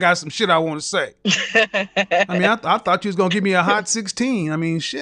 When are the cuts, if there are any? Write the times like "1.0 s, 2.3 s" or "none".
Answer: 1.1 s